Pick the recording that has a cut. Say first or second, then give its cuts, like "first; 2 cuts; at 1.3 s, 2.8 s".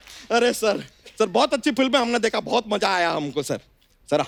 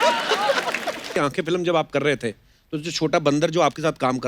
second; 1 cut; at 1.1 s